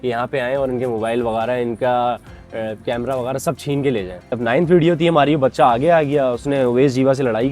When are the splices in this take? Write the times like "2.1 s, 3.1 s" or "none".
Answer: 4.2 s

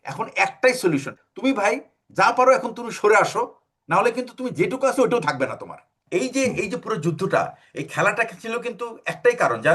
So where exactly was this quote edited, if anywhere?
1.1 s, 6.0 s

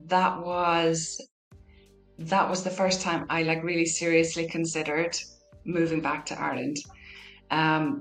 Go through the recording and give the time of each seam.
none

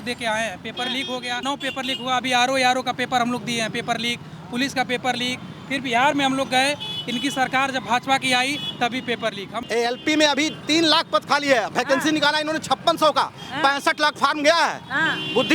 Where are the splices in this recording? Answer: 1.4 s, 9.5 s

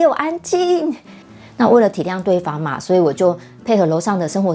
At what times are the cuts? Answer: 1.1 s

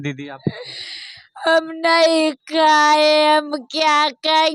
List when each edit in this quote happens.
none

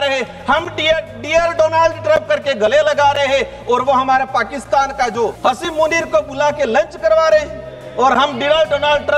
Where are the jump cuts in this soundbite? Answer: 5.4 s

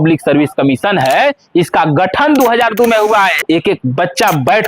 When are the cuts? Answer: 3.4 s

